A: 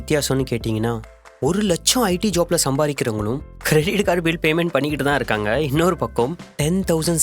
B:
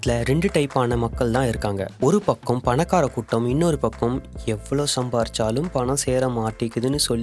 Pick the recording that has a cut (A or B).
A